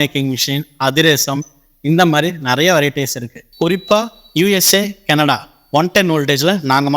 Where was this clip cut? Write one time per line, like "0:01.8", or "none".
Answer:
0:03.5